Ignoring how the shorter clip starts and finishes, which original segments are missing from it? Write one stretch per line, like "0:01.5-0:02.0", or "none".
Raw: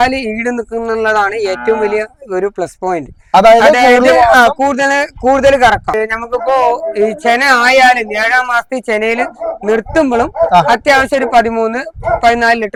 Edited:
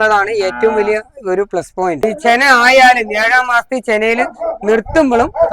0:03.1-0:07.0